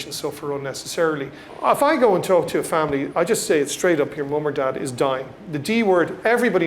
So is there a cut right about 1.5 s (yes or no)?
yes